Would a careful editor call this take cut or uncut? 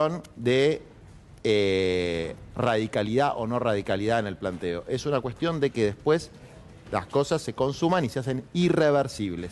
uncut